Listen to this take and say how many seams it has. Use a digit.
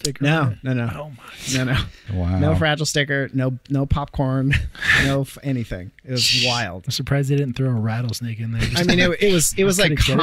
2